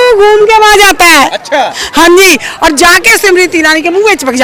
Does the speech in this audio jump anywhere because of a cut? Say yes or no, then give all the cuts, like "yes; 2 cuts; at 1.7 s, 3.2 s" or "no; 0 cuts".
no; 0 cuts